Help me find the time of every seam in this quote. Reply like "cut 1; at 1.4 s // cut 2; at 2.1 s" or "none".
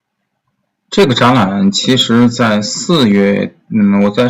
none